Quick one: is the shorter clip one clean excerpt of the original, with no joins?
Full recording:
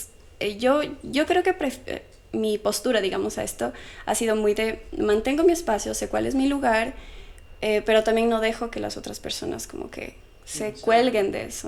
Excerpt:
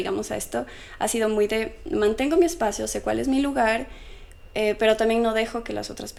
yes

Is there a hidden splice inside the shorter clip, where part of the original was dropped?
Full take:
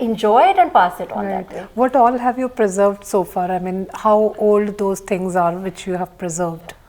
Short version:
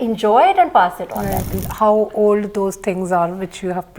yes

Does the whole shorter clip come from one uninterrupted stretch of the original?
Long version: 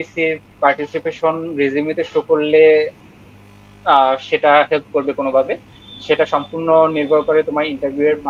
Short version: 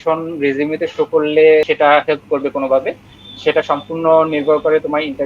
no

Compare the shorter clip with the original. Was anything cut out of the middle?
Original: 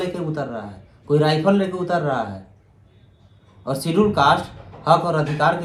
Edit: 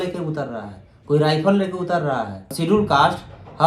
yes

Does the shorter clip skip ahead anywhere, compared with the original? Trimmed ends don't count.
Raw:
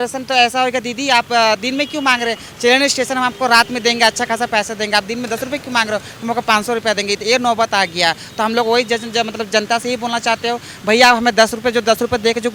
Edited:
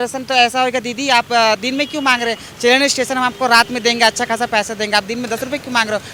no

